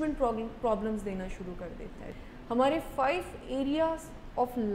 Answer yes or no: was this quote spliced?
yes